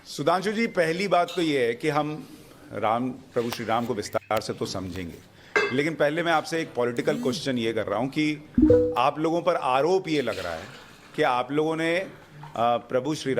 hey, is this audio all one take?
no; 1 cut; at 6.7 s

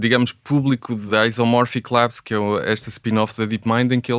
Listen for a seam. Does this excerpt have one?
yes; 1 cut; at 1.1 s

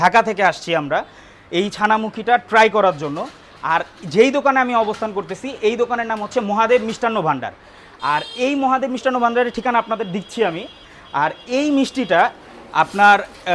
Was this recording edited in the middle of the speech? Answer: no; 0 cuts

